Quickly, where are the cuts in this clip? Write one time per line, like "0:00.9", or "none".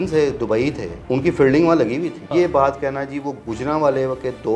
0:00.9
0:02.3